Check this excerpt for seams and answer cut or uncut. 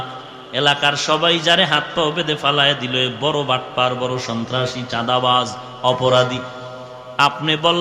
uncut